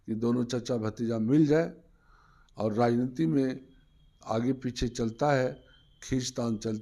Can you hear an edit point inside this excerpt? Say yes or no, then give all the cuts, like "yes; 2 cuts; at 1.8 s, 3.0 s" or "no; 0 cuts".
no; 0 cuts